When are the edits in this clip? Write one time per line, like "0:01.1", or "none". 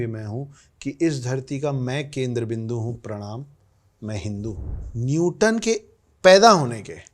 0:04.7